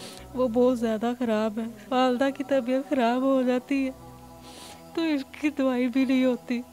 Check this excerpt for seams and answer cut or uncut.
cut